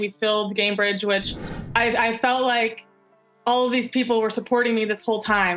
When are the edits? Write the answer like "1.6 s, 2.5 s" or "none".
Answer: 1.5 s